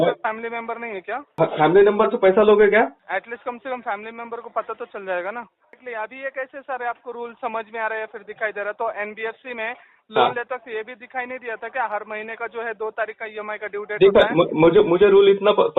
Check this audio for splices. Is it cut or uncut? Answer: cut